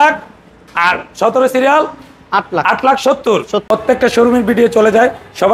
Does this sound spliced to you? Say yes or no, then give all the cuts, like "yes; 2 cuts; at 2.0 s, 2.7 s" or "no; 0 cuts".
yes; 1 cut; at 3.6 s